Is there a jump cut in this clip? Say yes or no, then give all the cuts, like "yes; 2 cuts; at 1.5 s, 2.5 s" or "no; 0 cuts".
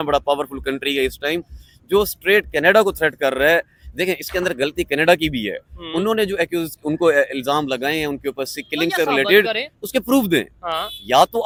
no; 0 cuts